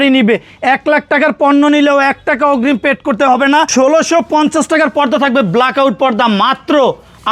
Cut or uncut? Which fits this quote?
cut